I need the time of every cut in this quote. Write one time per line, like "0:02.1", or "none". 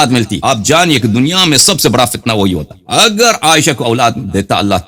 none